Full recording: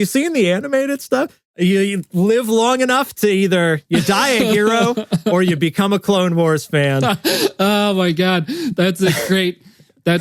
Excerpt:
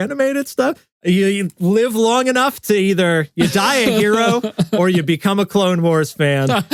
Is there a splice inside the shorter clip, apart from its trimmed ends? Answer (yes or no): no